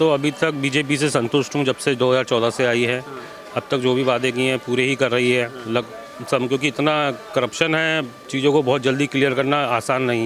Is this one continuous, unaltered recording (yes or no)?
yes